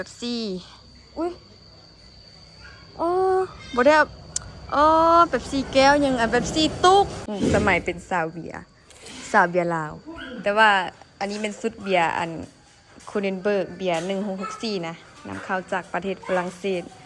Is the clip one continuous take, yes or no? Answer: no